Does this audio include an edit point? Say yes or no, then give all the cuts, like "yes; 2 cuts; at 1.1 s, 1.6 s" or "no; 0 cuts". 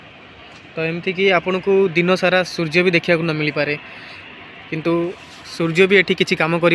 no; 0 cuts